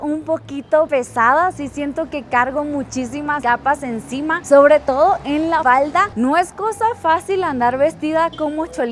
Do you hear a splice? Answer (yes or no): yes